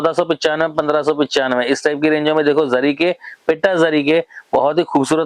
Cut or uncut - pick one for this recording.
uncut